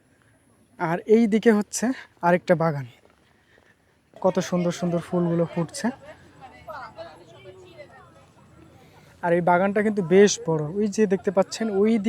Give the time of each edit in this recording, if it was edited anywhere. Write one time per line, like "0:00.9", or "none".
0:04.1

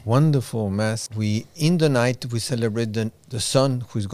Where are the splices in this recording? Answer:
0:01.1

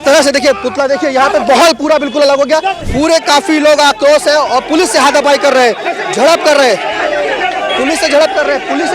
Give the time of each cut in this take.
0:02.8

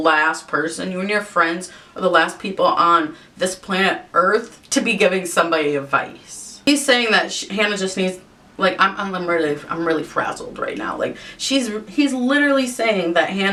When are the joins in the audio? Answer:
none

